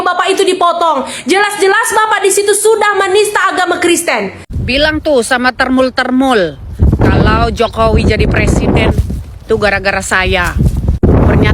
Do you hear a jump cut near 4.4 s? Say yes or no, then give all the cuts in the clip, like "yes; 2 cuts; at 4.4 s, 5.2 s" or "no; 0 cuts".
yes; 1 cut; at 4.4 s